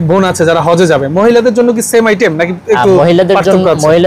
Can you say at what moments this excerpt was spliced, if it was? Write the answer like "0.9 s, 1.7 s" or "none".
none